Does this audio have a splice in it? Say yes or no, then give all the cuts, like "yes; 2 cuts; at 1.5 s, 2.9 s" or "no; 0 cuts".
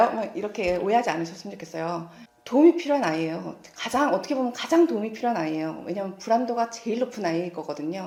no; 0 cuts